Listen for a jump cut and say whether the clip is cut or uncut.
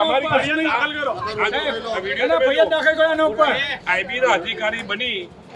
cut